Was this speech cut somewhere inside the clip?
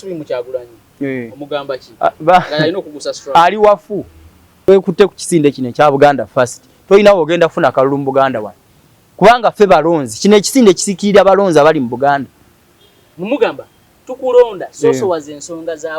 yes; 1 cut; at 4.7 s

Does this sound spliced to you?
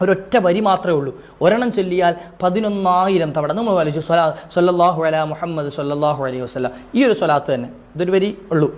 no; 0 cuts

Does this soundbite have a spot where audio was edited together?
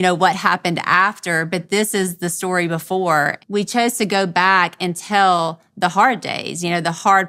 yes; 1 cut; at 3.4 s

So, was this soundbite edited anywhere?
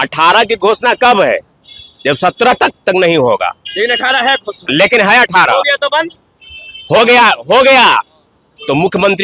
no; 0 cuts

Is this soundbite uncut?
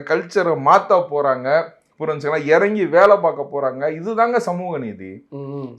yes; 0 cuts

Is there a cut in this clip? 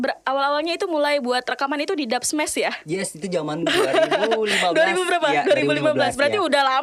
no; 0 cuts

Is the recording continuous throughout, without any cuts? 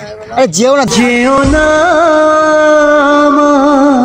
yes; 0 cuts

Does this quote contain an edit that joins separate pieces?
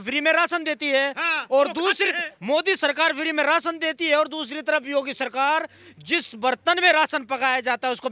no; 0 cuts

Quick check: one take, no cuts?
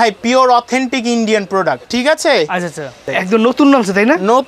no; 2 cuts; at 1.9 s, 3.1 s

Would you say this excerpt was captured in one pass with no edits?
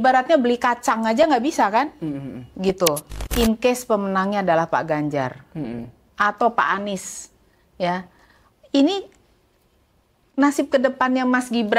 no; 1 cut; at 3.2 s

